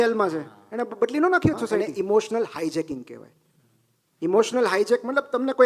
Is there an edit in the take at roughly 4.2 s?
no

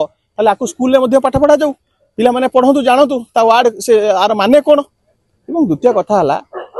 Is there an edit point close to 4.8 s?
no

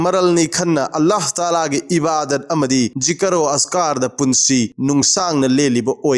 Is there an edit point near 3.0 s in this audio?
yes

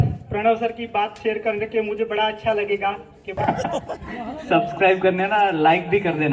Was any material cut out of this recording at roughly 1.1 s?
no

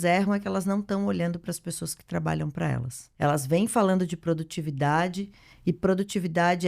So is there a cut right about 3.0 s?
yes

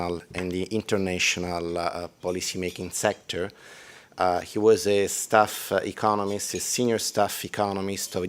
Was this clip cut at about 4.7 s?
yes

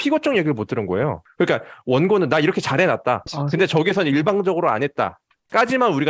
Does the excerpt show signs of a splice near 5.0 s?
no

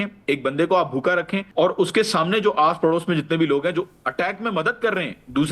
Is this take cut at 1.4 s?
yes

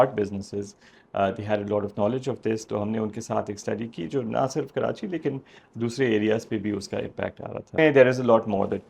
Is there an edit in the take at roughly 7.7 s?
yes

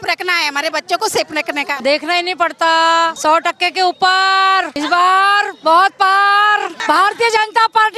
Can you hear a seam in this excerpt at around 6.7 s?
yes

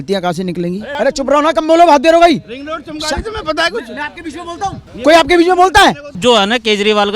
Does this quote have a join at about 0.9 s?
yes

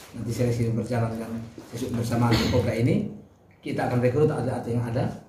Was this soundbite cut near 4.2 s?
no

